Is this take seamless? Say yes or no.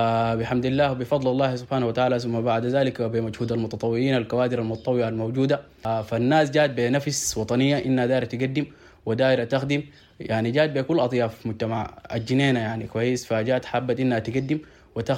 yes